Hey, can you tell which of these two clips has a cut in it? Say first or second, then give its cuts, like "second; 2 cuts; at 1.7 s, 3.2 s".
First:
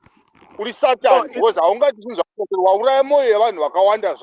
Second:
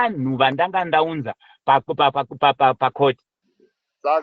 second; 1 cut; at 3.3 s